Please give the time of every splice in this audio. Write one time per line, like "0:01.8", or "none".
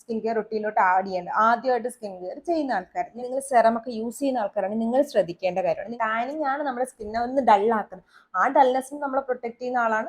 0:03.2
0:05.9